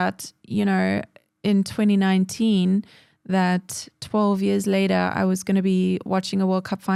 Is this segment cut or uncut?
uncut